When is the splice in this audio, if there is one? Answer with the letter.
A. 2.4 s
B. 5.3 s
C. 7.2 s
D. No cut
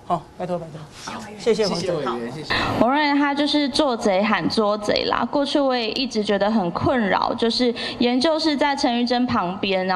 A